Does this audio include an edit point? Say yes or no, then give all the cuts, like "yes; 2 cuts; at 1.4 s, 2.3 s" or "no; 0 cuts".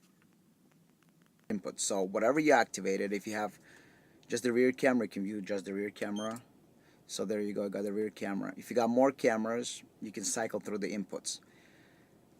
yes; 1 cut; at 1.5 s